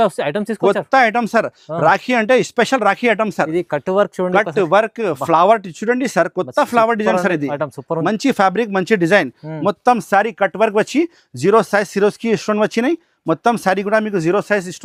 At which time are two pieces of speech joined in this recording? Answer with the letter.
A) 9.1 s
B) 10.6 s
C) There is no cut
C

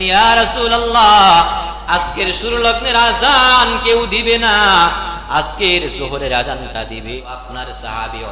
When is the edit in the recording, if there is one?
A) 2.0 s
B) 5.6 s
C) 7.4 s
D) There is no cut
C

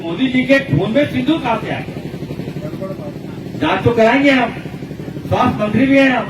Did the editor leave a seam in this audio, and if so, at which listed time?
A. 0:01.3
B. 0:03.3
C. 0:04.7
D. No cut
B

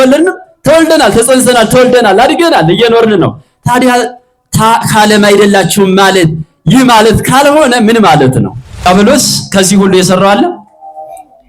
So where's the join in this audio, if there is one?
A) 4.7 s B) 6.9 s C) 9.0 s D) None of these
C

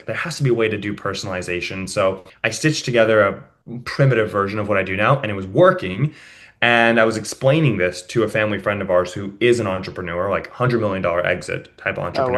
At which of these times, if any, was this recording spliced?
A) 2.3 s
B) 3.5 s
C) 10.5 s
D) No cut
A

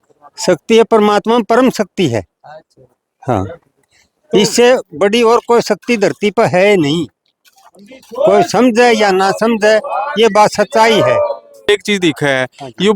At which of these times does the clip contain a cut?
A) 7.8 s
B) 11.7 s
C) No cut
B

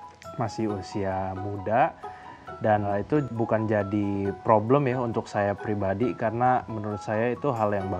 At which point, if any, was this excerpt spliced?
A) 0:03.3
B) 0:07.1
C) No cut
A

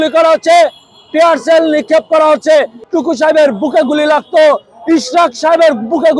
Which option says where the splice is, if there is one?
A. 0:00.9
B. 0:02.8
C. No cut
B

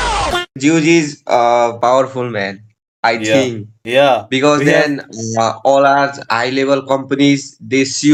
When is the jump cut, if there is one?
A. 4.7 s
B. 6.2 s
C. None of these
C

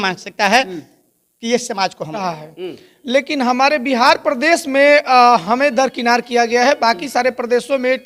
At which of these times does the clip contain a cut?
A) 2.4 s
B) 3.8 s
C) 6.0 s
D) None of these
A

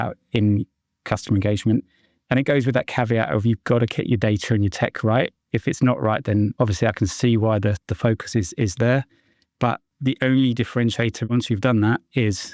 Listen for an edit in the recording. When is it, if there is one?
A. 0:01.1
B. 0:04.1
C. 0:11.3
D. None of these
C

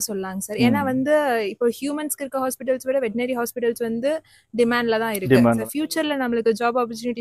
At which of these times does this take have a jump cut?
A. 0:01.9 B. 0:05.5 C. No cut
B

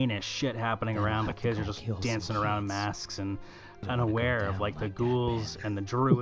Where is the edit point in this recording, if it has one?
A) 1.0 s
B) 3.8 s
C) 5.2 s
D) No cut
B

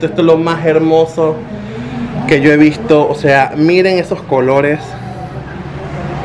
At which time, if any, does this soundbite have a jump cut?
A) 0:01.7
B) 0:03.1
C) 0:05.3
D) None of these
D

